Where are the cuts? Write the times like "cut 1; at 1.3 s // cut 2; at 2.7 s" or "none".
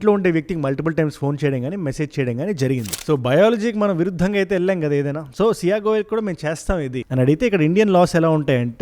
cut 1; at 2.9 s